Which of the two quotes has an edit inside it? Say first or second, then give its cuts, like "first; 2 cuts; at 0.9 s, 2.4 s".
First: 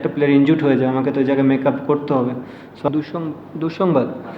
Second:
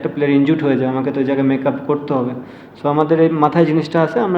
first; 1 cut; at 2.9 s